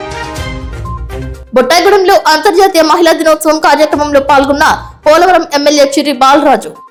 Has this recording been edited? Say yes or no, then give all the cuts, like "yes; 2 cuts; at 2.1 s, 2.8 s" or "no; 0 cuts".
no; 0 cuts